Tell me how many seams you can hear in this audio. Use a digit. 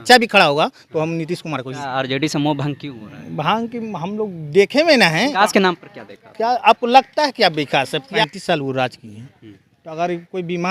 3